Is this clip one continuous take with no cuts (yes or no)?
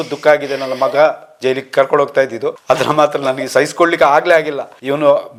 yes